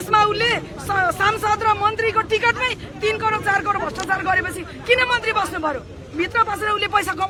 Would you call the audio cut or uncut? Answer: uncut